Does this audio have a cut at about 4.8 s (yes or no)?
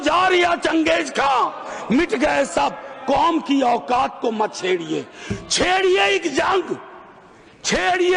no